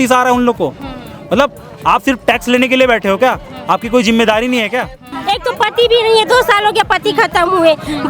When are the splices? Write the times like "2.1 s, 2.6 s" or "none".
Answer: 5.1 s